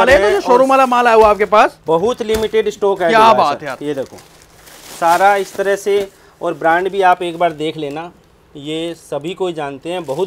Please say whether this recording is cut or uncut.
uncut